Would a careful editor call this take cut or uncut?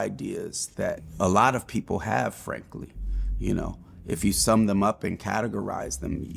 cut